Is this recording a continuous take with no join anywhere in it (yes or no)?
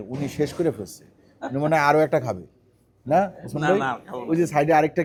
yes